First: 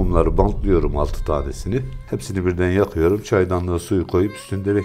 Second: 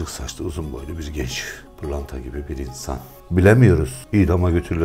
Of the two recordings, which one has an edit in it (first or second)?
second